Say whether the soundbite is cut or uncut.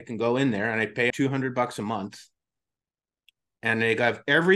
cut